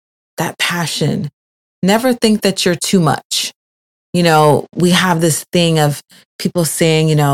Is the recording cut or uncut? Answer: uncut